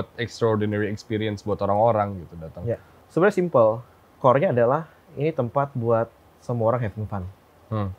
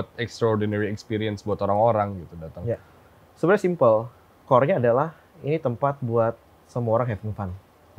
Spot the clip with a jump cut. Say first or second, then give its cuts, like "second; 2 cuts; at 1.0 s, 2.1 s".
first; 1 cut; at 2.9 s